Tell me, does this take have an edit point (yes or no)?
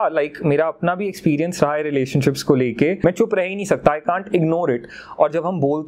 yes